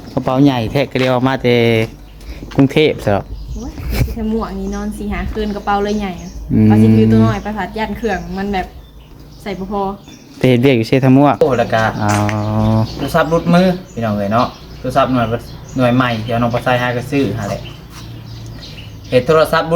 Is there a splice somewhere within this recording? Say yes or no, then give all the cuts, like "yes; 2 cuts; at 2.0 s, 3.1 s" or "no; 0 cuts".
yes; 1 cut; at 13.0 s